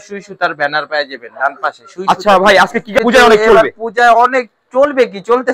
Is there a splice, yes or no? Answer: yes